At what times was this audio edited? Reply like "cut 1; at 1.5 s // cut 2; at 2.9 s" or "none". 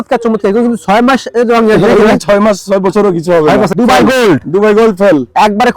cut 1; at 3.7 s

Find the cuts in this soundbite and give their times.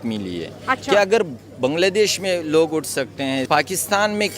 cut 1; at 3.4 s

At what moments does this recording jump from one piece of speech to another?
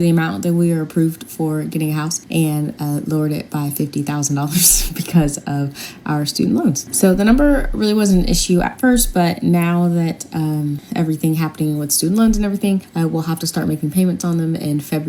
none

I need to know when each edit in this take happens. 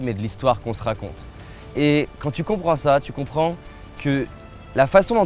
none

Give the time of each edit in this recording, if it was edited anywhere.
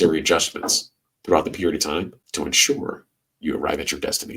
cut 1; at 2.2 s

